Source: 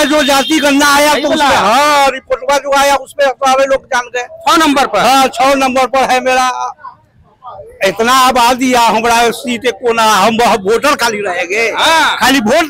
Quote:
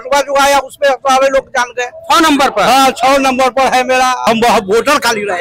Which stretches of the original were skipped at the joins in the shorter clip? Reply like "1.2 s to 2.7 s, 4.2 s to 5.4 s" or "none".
6.6 s to 10.2 s